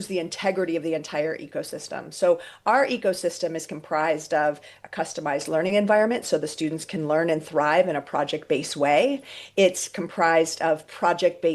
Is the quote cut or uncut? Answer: uncut